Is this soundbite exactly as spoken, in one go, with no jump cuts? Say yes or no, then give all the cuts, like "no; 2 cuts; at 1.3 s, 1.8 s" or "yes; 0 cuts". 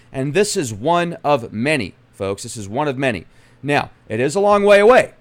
no; 1 cut; at 2.5 s